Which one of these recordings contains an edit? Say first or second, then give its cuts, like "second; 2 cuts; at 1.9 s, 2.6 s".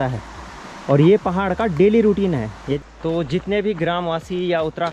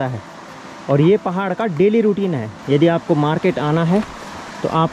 first; 1 cut; at 2.6 s